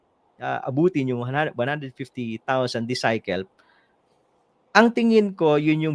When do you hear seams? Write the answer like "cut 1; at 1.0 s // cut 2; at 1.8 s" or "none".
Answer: none